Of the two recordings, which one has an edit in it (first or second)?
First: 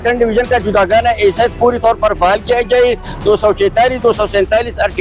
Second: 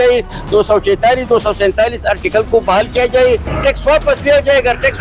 second